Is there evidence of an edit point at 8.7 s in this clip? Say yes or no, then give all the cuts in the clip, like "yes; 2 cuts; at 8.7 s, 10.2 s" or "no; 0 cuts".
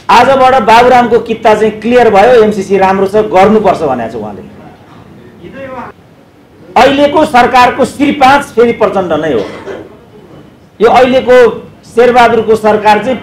no; 1 cut; at 5.9 s